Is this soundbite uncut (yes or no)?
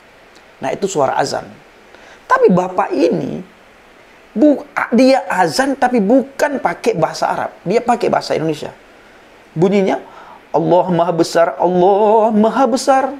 yes